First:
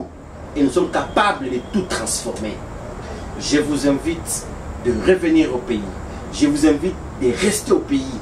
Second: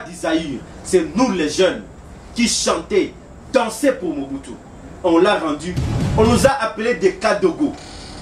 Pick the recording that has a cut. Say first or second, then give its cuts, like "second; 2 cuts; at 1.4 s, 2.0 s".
second; 1 cut; at 5.8 s